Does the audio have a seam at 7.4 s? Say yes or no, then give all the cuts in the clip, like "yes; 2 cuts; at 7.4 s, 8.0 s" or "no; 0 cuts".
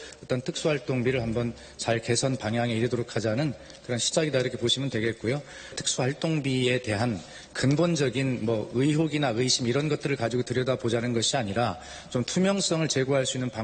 no; 0 cuts